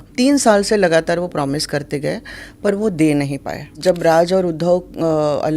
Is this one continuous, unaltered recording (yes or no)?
no